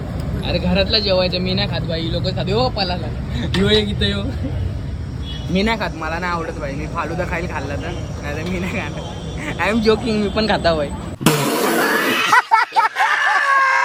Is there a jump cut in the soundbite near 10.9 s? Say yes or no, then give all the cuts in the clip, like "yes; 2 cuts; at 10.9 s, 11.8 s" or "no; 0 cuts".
no; 0 cuts